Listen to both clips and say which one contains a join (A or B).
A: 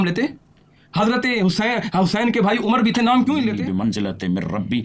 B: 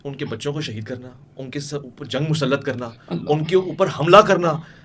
A